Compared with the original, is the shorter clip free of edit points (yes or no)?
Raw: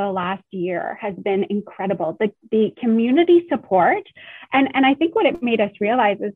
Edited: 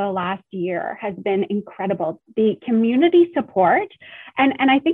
no